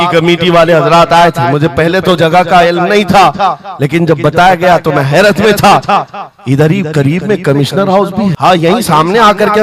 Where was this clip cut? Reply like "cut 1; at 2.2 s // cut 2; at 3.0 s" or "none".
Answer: cut 1; at 8.4 s